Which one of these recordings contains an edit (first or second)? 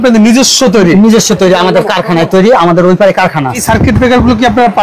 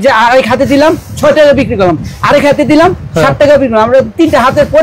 first